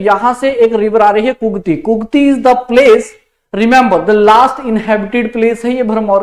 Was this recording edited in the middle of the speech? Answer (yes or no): no